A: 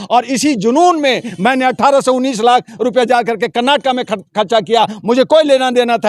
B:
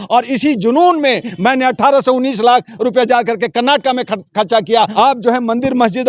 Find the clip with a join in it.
B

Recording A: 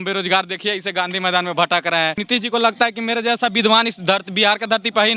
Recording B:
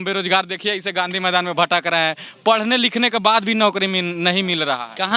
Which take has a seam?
A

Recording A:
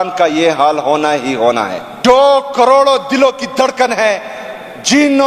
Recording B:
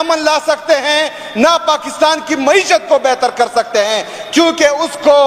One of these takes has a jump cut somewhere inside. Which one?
A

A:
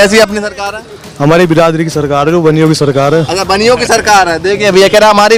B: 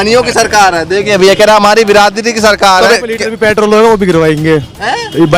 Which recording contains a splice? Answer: B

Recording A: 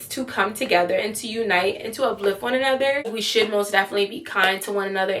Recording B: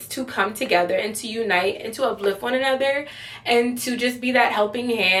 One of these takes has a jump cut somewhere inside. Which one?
A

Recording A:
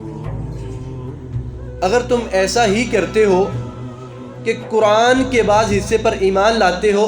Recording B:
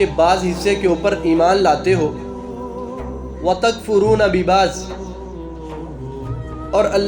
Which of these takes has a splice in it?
B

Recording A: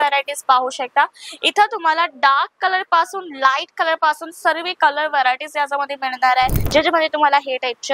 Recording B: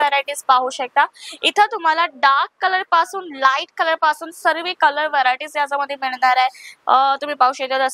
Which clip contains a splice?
A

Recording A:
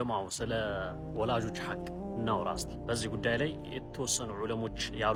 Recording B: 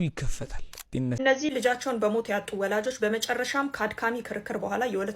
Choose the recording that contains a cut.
B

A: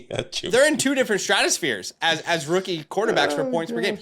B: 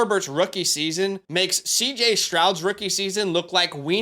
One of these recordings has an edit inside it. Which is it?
B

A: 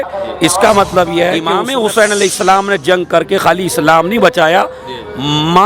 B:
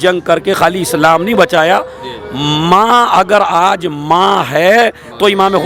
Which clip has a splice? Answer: A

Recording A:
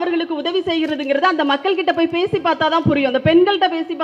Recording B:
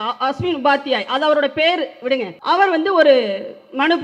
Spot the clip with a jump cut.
B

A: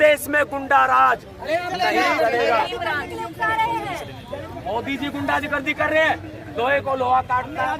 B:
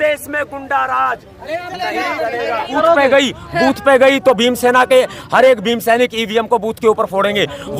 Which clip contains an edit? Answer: B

